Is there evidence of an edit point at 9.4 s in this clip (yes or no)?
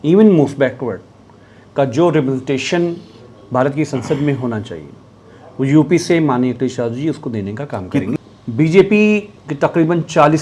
yes